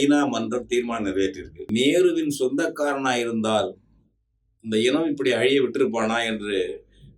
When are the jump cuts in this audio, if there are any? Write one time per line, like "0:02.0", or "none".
0:01.5